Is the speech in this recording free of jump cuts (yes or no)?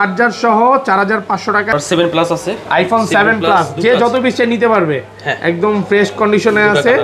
no